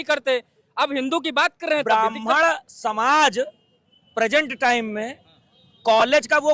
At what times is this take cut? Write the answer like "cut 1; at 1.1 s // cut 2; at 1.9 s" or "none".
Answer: cut 1; at 1.8 s